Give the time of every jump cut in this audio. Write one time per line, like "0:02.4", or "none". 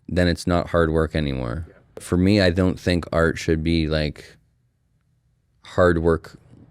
0:02.1

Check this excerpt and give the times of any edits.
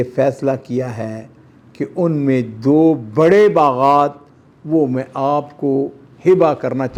none

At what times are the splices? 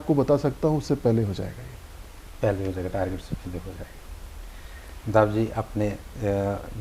none

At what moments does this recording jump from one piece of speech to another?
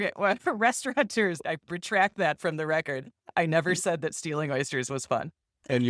none

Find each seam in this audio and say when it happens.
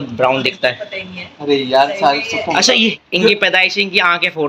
0:03.0

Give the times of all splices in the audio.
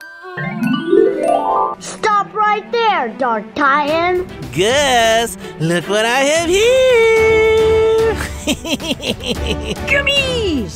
0:01.8
0:04.4

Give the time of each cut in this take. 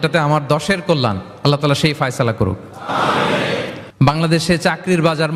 0:03.8

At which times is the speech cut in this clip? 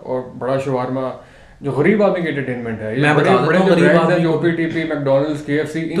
none

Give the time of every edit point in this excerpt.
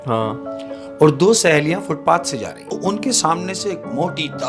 0:02.8

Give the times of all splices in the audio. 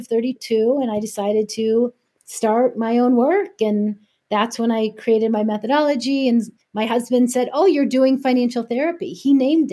none

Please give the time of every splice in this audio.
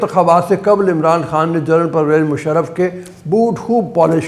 none

